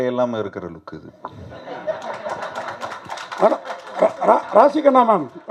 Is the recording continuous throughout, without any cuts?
yes; 0 cuts

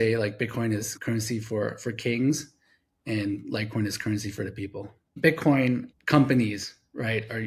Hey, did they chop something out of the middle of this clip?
yes; 2 cuts; at 0.9 s, 5.2 s

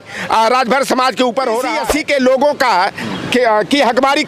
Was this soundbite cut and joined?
yes; 1 cut; at 1.7 s

